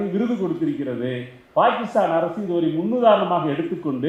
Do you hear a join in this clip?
no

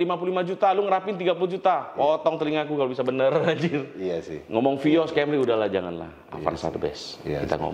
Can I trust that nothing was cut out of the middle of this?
yes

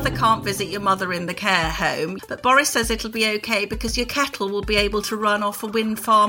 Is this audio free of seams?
no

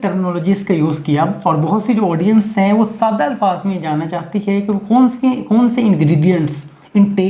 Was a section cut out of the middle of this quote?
no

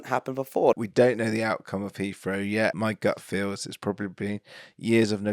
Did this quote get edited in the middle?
yes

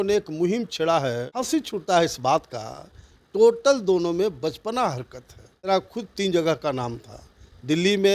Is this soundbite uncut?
no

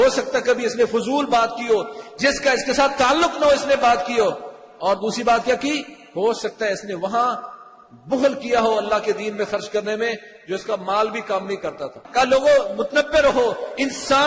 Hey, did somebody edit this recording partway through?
yes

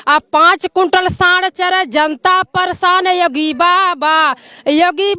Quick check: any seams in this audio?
no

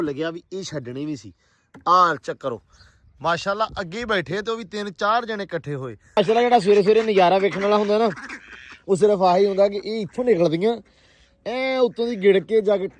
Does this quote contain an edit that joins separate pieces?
yes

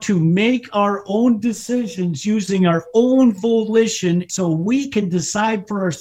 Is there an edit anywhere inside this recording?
yes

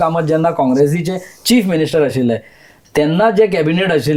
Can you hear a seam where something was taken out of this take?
no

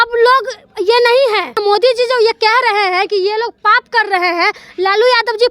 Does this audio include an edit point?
yes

